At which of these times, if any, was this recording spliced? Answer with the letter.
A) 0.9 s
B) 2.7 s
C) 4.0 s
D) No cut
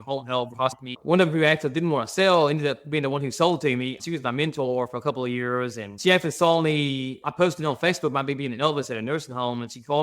A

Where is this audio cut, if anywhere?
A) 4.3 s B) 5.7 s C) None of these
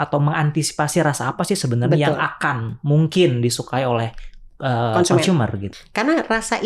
B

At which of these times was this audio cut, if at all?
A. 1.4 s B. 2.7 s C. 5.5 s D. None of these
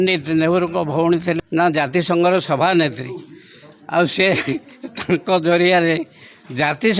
A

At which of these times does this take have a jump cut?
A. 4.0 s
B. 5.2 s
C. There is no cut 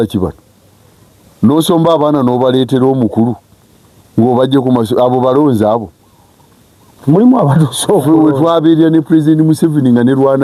C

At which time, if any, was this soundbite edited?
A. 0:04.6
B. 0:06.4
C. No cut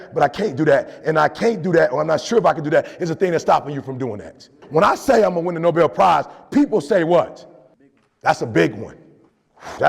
A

